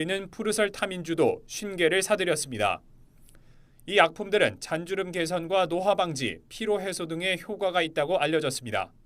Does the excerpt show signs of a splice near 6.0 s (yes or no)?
no